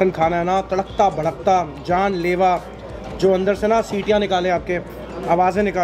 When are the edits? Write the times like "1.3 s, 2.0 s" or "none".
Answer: none